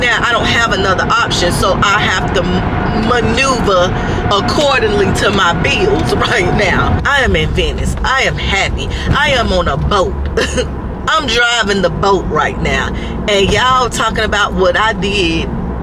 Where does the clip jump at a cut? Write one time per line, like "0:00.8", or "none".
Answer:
0:07.0